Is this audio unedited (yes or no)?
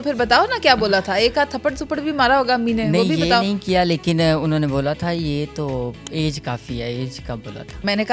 yes